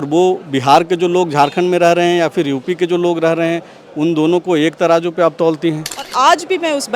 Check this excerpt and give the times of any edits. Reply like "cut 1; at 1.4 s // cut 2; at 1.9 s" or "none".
cut 1; at 5.9 s